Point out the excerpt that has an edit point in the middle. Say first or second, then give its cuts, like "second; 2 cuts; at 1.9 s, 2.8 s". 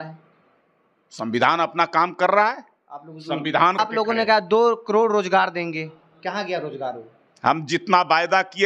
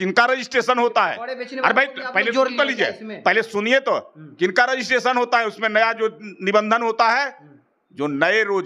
first; 1 cut; at 3.8 s